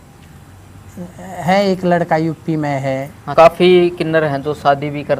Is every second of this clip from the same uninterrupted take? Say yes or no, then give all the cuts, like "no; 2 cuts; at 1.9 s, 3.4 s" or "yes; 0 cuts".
no; 1 cut; at 3.2 s